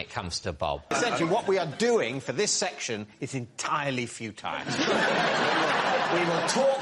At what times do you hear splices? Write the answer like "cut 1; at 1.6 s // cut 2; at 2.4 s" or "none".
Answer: cut 1; at 0.9 s